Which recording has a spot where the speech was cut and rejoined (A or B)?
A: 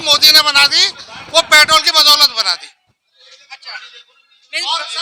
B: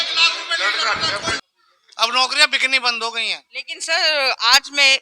B